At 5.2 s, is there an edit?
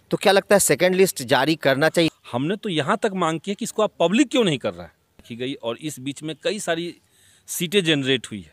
yes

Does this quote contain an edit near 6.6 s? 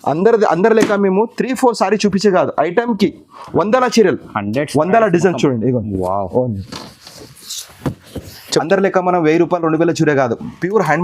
no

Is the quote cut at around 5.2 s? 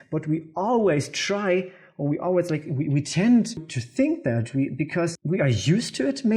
yes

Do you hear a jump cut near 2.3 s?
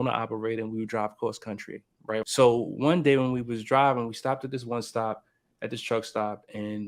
yes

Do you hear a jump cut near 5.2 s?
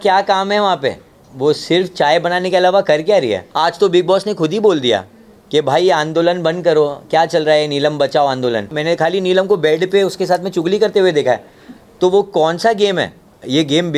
no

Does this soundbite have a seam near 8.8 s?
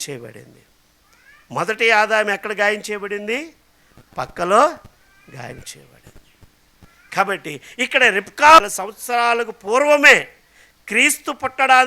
yes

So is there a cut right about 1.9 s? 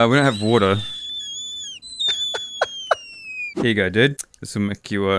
no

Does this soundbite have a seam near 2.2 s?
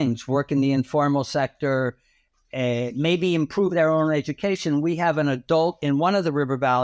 no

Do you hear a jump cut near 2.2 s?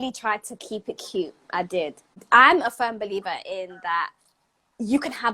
yes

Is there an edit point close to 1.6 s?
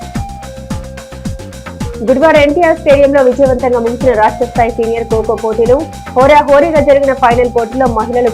no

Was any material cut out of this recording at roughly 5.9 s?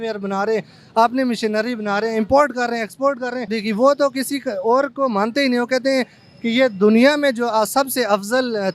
no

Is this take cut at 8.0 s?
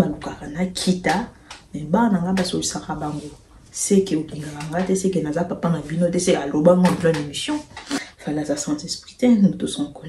yes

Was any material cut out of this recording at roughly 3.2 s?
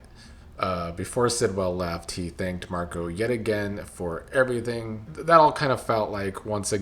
no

